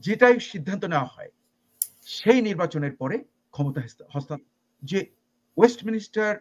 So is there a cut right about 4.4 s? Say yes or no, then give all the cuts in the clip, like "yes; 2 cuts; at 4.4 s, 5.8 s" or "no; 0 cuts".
yes; 1 cut; at 4.4 s